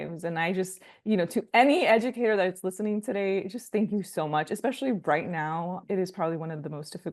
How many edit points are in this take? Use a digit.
1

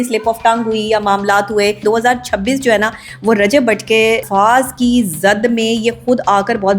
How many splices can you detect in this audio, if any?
2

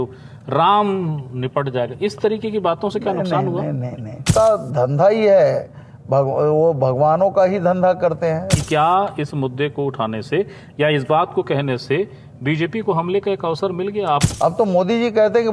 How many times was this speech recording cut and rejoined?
3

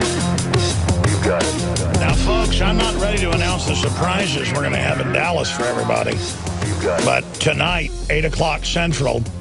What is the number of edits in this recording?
1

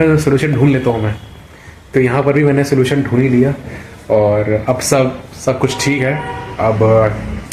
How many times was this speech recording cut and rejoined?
0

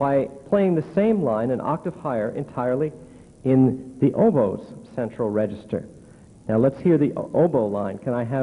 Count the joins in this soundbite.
0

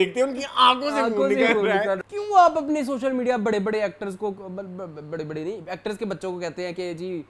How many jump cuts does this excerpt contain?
1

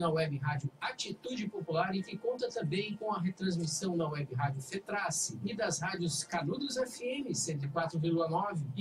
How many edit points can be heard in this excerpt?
1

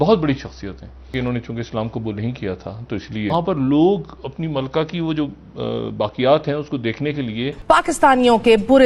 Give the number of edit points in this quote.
3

